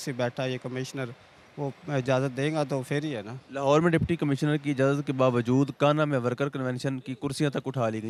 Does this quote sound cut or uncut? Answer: uncut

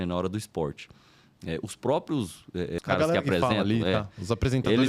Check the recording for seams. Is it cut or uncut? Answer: cut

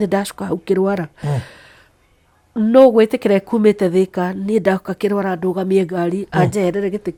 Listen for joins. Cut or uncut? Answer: uncut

